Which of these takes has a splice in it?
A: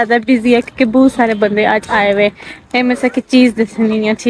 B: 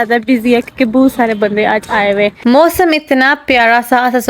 B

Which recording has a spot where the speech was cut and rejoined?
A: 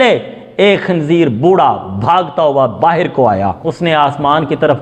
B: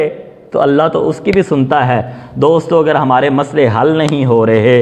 A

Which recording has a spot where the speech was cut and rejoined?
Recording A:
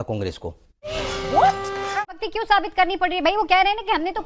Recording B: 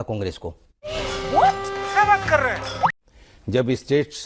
A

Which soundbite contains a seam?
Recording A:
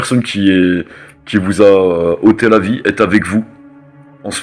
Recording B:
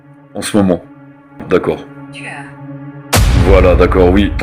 B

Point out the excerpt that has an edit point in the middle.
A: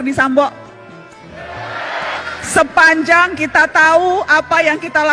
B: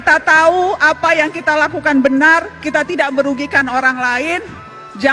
A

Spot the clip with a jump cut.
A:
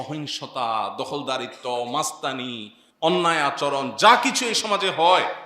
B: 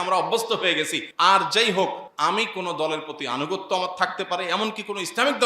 B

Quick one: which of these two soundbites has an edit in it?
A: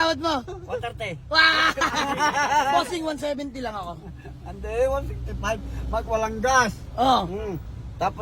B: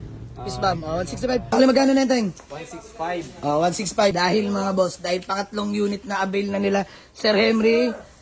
B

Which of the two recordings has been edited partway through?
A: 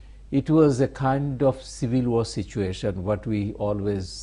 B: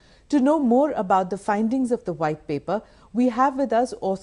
B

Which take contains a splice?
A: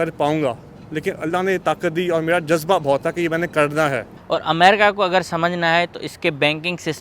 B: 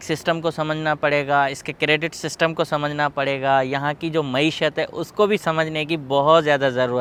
A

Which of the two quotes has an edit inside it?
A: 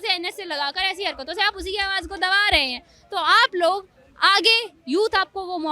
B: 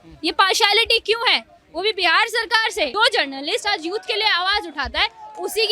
B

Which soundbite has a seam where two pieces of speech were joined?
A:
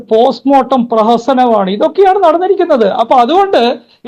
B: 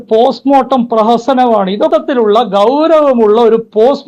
B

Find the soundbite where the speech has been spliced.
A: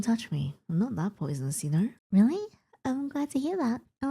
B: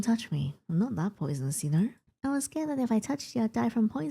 B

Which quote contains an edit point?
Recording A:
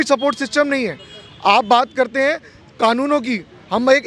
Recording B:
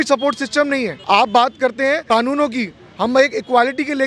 B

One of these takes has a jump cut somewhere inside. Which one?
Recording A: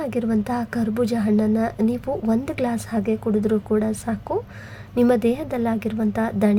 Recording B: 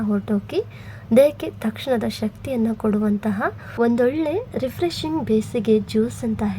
B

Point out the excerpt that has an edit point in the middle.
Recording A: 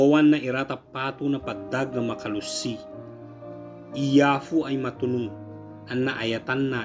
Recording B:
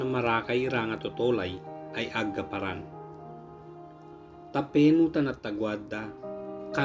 B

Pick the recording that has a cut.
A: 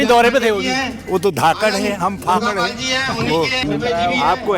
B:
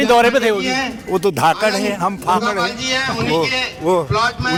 A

